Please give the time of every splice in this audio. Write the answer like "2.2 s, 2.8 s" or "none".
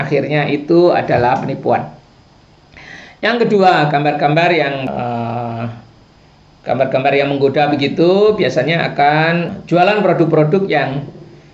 4.8 s, 9.5 s